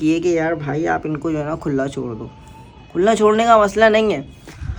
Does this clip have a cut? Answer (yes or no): no